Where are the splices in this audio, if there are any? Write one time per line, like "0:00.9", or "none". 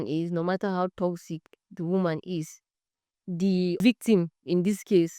0:03.8